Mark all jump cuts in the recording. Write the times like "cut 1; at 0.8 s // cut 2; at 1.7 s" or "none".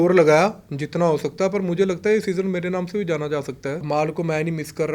cut 1; at 3.8 s